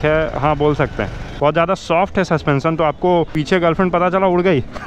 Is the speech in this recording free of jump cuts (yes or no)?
no